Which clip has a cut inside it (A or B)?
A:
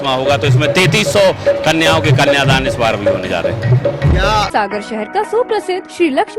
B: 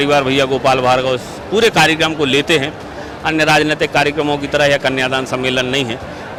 A